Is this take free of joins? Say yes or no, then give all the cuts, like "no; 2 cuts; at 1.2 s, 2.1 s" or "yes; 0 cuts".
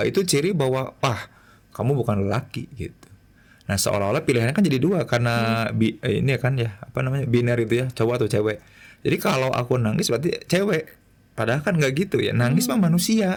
yes; 0 cuts